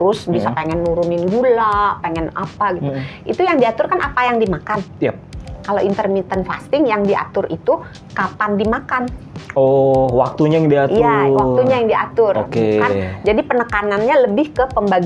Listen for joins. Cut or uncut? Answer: uncut